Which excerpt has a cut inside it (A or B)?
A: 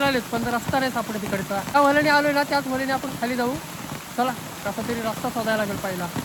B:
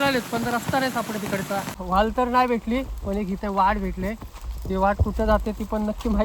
B